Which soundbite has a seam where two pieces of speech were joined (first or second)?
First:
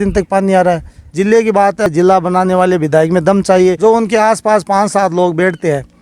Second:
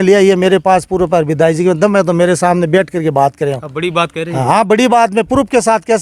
first